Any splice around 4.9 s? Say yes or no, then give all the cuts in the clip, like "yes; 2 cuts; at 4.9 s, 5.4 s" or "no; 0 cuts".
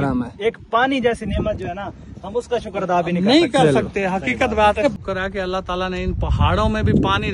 yes; 1 cut; at 4.9 s